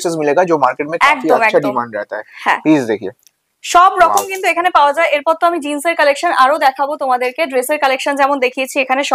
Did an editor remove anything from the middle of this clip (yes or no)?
no